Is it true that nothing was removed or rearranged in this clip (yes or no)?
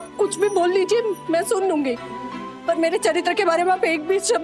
yes